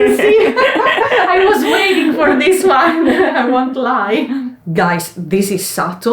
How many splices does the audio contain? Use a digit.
0